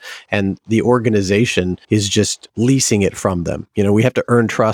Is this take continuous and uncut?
yes; 0 cuts

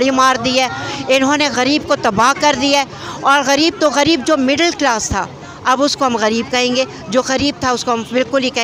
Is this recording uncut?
yes; 0 cuts

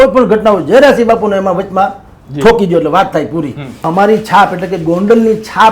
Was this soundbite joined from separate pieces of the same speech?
yes; 1 cut; at 3.8 s

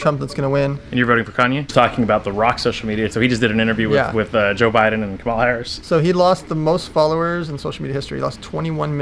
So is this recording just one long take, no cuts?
no; 3 cuts; at 1.7 s, 3.1 s, 5.7 s

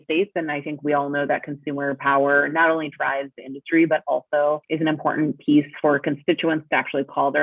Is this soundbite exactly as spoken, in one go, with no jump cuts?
no; 1 cut; at 4.7 s

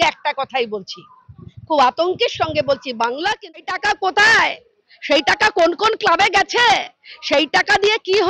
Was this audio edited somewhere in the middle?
yes; 1 cut; at 3.7 s

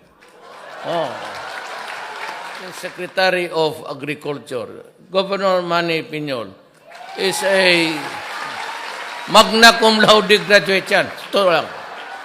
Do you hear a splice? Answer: yes; 1 cut; at 2.9 s

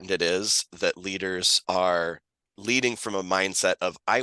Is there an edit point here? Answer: yes; 1 cut; at 1.5 s

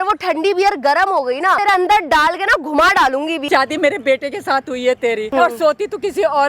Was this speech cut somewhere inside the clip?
yes; 3 cuts; at 1.6 s, 3.4 s, 5.2 s

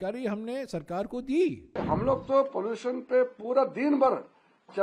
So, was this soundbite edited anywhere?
yes; 1 cut; at 1.7 s

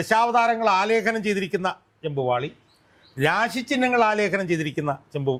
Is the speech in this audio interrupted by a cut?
no; 0 cuts

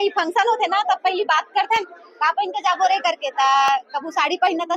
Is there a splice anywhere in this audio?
no; 0 cuts

